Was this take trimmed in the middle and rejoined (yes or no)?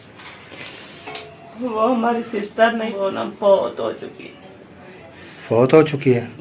yes